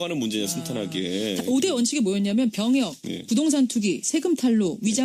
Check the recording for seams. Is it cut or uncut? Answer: uncut